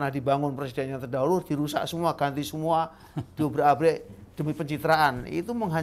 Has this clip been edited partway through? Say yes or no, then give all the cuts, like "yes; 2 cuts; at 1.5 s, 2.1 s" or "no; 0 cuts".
no; 0 cuts